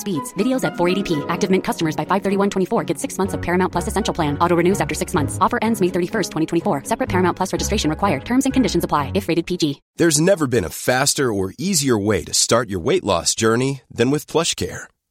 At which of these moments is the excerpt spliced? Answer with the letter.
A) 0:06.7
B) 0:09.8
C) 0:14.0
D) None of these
B